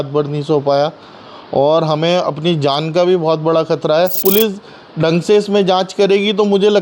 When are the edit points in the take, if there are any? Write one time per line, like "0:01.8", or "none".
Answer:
0:04.2

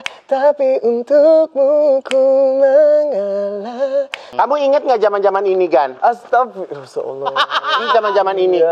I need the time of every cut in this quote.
0:04.3

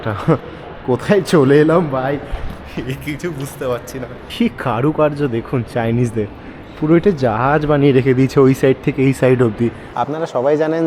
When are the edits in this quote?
0:04.2
0:09.9

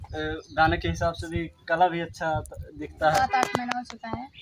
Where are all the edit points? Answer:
0:03.2

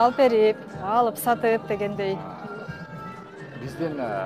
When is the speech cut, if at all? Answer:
none

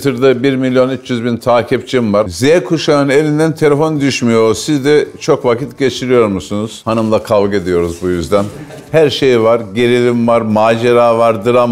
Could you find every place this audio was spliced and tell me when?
0:02.3
0:08.8

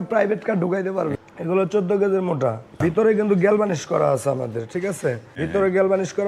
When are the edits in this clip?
0:01.2
0:02.8
0:05.3

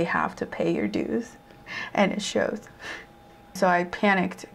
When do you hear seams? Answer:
0:03.5

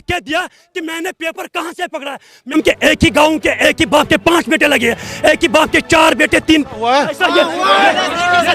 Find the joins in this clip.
0:02.5

